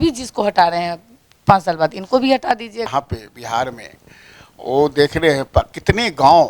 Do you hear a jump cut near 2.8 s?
yes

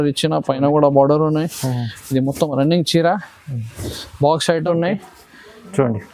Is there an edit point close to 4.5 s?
yes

